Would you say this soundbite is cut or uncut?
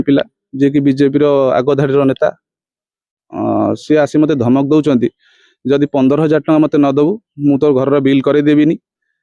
uncut